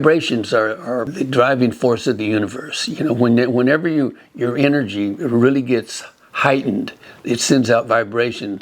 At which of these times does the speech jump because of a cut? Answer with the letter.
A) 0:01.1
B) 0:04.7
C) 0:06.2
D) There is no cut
A